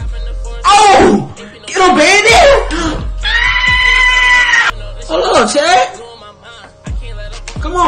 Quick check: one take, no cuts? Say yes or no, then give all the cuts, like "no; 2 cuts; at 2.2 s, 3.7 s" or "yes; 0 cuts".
no; 1 cut; at 4.6 s